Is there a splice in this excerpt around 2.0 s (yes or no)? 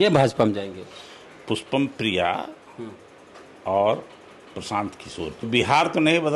no